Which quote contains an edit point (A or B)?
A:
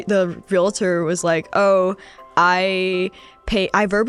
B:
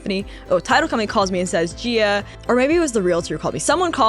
B